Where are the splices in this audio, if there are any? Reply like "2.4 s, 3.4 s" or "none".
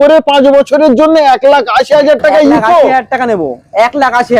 none